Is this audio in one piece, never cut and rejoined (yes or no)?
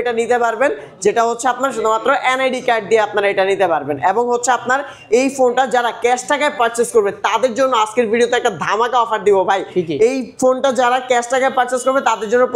yes